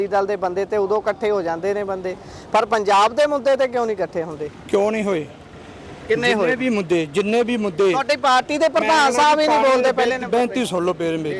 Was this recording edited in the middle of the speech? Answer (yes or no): no